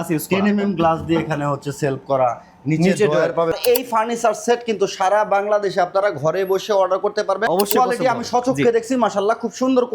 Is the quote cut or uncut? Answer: cut